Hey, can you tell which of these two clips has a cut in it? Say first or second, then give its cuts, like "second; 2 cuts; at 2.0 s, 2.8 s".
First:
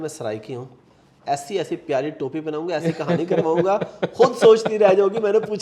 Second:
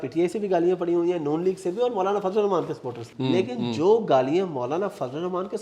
second; 1 cut; at 3.1 s